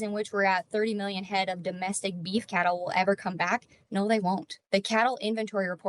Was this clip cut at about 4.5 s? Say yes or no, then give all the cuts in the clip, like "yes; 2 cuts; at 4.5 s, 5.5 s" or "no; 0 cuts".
yes; 1 cut; at 4.5 s